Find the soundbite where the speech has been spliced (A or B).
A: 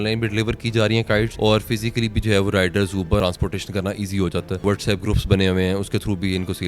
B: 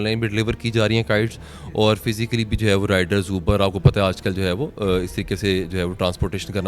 A